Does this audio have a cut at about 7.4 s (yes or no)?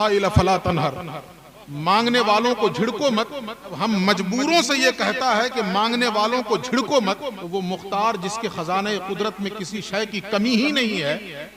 yes